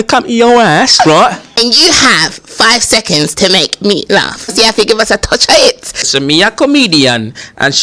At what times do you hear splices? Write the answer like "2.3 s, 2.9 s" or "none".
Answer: 1.5 s, 4.5 s, 6.1 s